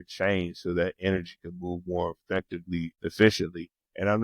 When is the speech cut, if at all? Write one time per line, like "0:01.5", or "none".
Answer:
0:02.9